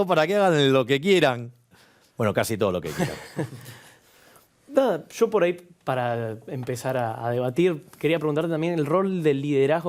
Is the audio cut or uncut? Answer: uncut